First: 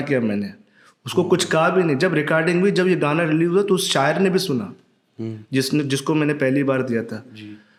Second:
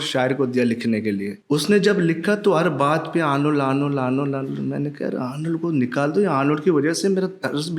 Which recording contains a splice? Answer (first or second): second